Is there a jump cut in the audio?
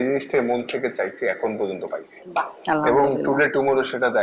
no; 0 cuts

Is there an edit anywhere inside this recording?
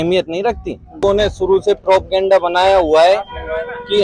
yes; 1 cut; at 0.9 s

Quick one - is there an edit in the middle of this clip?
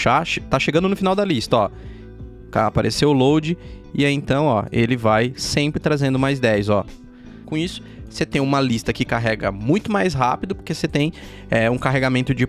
yes; 1 cut; at 7.4 s

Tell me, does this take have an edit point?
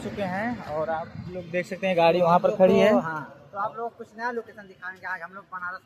no; 0 cuts

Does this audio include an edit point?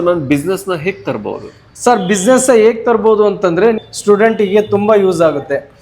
yes; 1 cut; at 3.8 s

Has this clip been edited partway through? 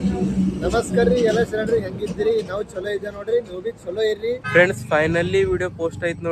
yes; 1 cut; at 4.4 s

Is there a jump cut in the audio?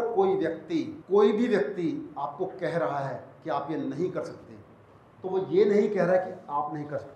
yes; 1 cut; at 1.0 s

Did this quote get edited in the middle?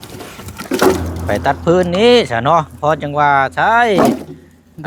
yes; 1 cut; at 1.1 s

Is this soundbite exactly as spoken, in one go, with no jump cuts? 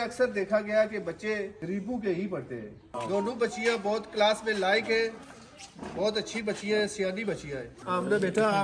no; 3 cuts; at 1.6 s, 2.8 s, 7.7 s

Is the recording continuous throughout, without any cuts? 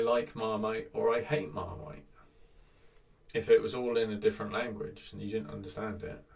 yes; 0 cuts

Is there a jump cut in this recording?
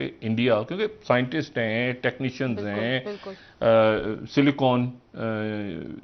no; 0 cuts

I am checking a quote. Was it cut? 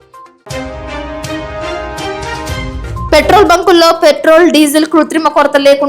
yes; 1 cut; at 3.1 s

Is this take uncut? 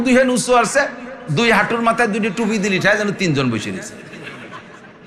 yes; 0 cuts

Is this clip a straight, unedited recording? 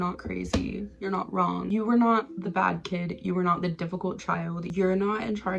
no; 2 cuts; at 1.7 s, 4.6 s

